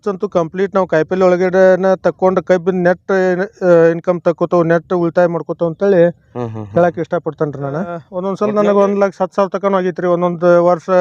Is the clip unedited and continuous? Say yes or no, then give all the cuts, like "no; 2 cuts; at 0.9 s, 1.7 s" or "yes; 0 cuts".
no; 1 cut; at 8.1 s